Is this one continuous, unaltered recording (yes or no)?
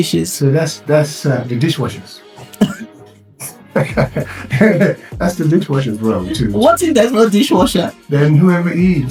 yes